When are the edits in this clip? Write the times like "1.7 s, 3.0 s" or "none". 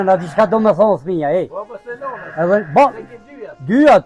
none